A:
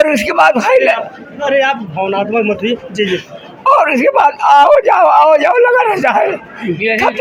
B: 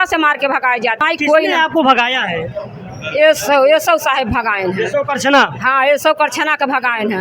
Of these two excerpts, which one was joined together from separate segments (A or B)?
B